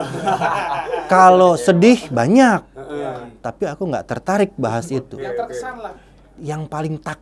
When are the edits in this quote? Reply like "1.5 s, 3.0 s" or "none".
none

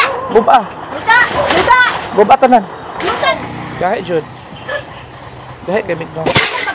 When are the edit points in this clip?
3.3 s

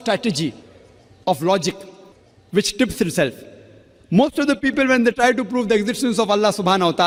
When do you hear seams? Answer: none

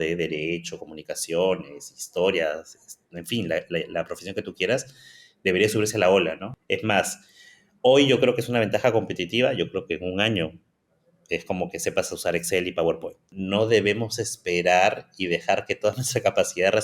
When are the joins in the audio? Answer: 13.2 s

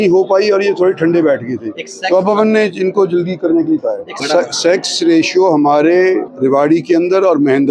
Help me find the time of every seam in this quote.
4.1 s, 6.3 s

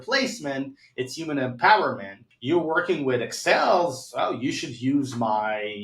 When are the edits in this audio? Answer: 2.3 s

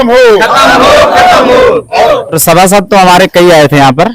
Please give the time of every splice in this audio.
2.0 s

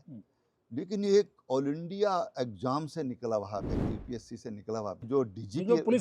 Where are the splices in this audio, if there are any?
5.0 s

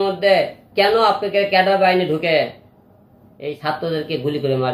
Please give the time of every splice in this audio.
3.6 s

